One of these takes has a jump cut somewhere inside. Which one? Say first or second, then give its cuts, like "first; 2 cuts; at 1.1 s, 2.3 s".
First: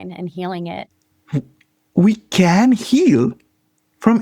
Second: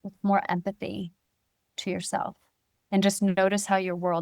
first; 1 cut; at 0.9 s